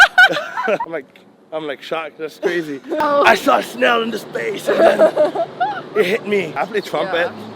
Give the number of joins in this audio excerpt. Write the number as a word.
three